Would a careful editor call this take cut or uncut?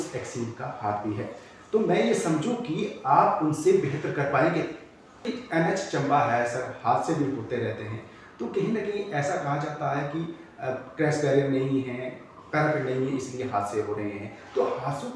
cut